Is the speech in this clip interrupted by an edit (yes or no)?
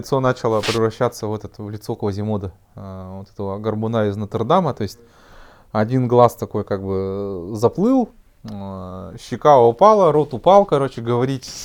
no